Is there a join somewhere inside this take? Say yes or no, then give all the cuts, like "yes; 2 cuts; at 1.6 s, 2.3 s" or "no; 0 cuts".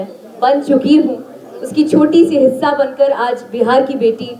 no; 0 cuts